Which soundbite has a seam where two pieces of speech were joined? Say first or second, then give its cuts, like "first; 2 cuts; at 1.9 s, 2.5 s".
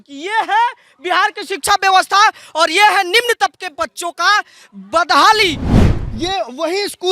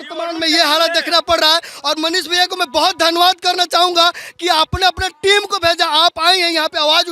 first; 1 cut; at 5.7 s